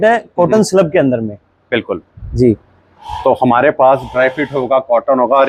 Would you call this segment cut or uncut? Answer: uncut